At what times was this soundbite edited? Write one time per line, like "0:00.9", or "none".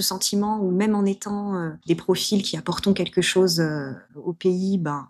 0:01.7
0:04.1